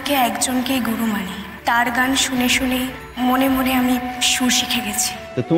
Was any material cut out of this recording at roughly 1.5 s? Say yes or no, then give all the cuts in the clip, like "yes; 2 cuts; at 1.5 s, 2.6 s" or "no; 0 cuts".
yes; 2 cuts; at 1.5 s, 3.0 s